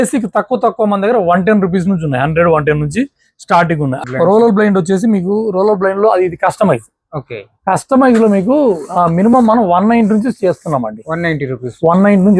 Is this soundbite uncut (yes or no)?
no